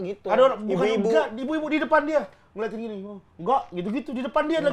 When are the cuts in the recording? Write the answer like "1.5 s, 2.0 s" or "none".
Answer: none